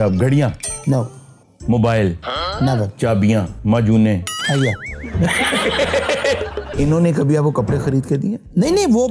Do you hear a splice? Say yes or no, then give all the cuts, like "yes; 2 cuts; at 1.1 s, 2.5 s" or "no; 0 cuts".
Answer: yes; 2 cuts; at 3.5 s, 6.4 s